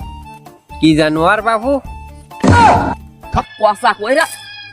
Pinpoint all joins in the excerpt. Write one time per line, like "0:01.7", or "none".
0:03.4